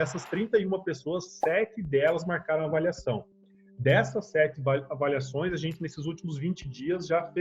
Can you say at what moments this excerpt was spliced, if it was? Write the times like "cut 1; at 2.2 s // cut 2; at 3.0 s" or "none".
none